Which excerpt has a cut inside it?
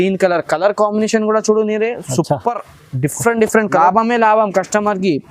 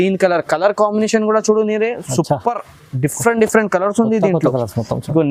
first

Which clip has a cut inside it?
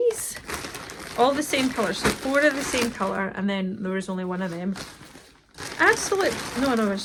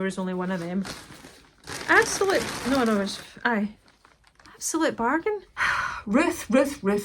second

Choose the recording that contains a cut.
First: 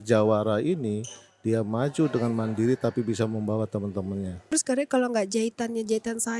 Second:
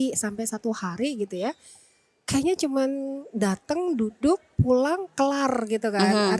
first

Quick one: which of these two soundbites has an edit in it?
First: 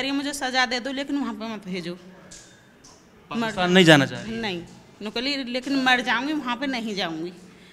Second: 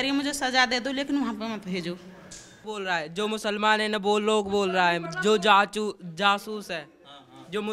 second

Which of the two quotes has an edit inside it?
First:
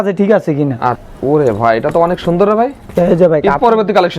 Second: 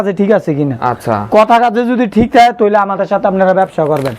first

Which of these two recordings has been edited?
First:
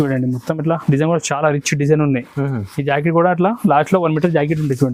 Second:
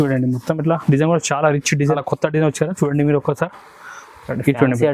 second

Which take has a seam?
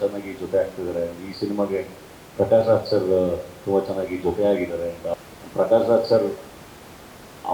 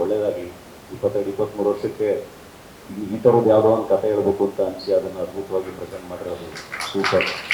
first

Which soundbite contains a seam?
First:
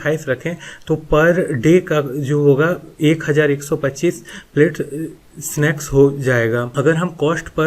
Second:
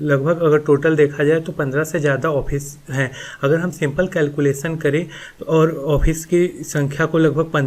first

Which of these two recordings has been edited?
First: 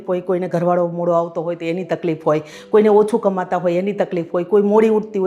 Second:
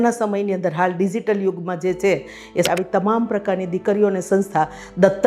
second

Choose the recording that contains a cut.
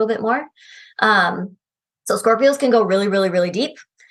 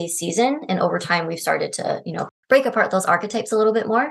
second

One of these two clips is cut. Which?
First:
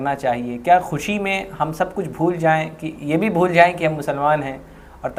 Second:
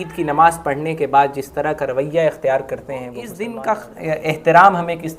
second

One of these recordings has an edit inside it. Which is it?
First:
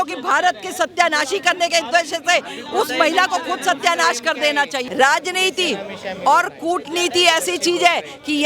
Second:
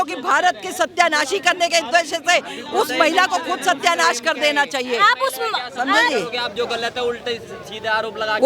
first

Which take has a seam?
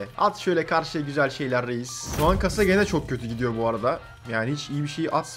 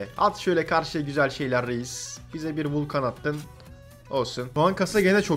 first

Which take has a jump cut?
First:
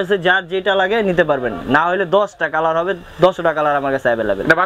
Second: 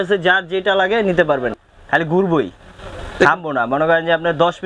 second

